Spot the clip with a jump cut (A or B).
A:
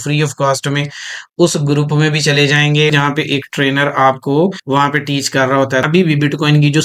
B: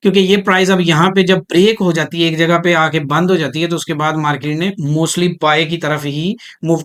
A